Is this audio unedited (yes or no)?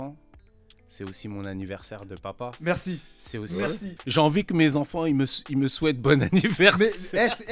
no